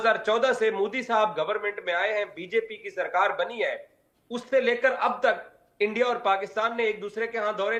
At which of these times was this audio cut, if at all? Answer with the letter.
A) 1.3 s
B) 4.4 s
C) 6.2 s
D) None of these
D